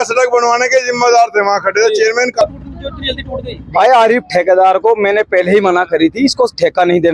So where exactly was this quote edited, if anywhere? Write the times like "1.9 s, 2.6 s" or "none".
2.4 s